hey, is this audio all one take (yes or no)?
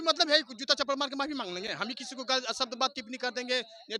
yes